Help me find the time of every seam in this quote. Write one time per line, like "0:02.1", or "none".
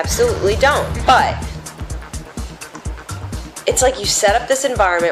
0:00.9